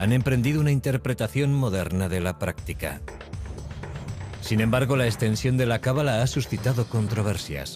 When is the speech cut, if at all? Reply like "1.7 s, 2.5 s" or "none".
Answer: none